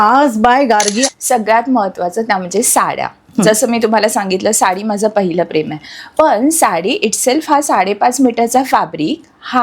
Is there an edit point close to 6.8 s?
no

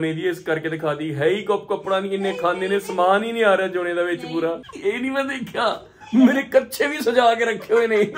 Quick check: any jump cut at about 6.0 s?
no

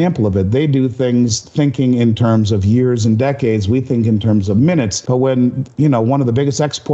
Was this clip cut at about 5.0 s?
yes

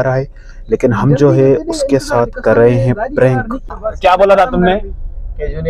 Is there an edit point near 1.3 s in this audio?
no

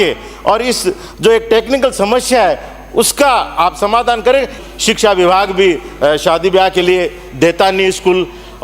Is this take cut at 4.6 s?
yes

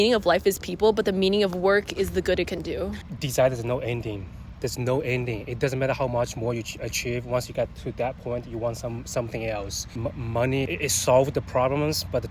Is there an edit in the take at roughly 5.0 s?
no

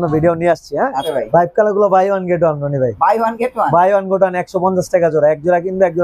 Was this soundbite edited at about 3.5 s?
no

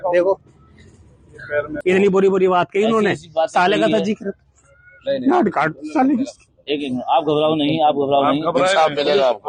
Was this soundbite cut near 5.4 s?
no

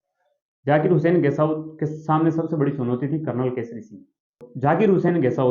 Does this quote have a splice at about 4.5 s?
yes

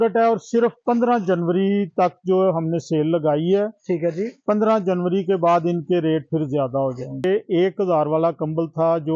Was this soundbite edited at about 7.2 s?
yes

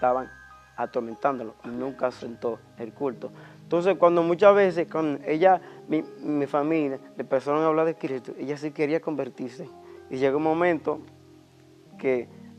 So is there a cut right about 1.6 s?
no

